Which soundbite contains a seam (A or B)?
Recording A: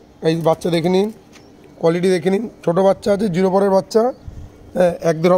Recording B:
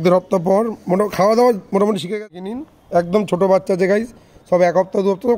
B